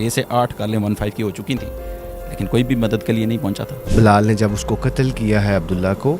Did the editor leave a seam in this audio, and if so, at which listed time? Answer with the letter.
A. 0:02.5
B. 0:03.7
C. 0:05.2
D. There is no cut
B